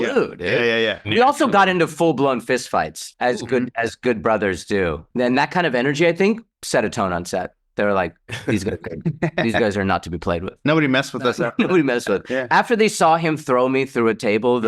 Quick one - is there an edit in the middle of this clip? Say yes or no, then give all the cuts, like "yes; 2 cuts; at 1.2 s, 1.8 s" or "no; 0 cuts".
yes; 2 cuts; at 1.0 s, 5.0 s